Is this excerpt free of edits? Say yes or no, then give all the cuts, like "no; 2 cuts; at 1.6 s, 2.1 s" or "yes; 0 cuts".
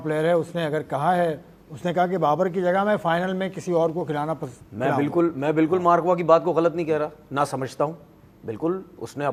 yes; 0 cuts